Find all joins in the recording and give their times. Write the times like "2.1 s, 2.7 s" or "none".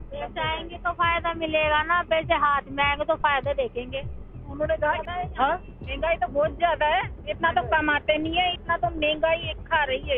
5.0 s